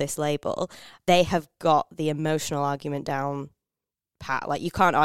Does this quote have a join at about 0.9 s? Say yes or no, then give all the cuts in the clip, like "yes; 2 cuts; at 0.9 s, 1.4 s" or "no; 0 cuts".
yes; 1 cut; at 0.9 s